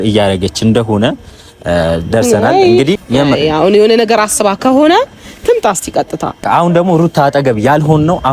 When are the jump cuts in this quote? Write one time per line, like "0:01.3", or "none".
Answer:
0:03.0
0:06.4